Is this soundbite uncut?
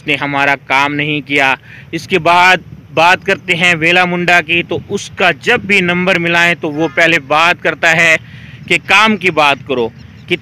yes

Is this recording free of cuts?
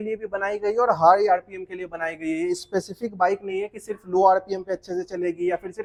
yes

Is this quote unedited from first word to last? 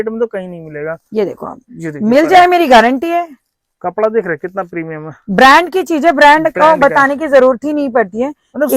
yes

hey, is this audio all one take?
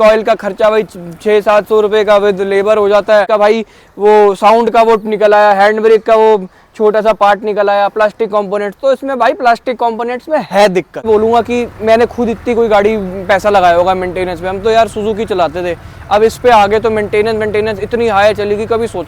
no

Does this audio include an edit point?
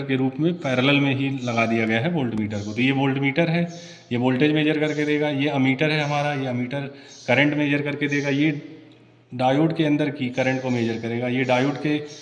no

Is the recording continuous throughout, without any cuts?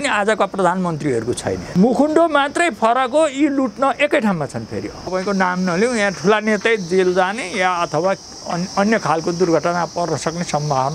no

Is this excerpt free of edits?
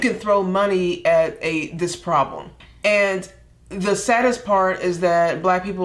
no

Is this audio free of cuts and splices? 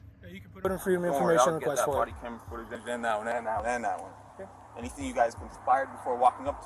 no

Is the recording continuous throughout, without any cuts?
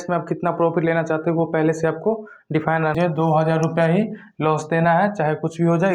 no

